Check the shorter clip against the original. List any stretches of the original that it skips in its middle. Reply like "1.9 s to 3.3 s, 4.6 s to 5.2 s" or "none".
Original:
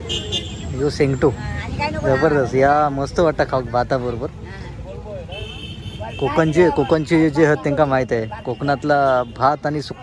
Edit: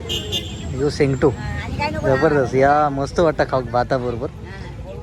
none